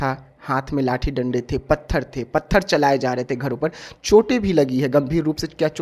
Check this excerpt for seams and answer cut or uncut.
uncut